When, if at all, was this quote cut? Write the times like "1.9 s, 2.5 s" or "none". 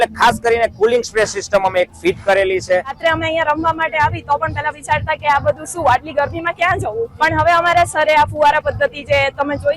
3.0 s, 7.1 s